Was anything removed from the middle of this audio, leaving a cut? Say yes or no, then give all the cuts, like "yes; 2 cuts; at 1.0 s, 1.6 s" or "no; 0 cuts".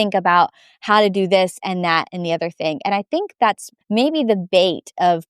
yes; 1 cut; at 3.7 s